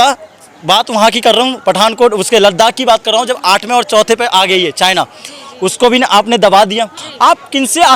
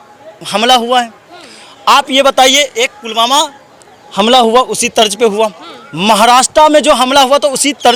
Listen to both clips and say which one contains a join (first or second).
first